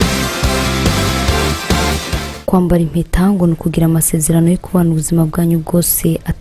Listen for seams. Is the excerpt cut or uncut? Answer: cut